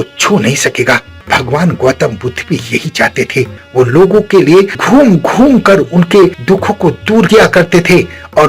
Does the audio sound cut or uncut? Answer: cut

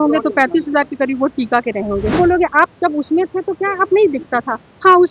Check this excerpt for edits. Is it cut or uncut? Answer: cut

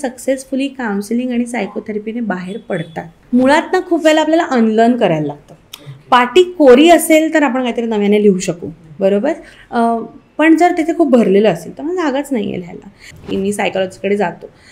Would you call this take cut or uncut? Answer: cut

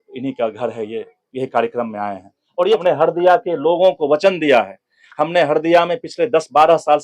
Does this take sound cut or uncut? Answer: cut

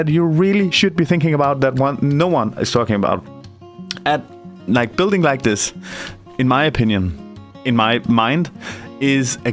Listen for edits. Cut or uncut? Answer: uncut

